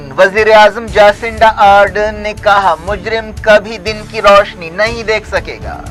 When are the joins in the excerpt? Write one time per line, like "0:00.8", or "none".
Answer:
none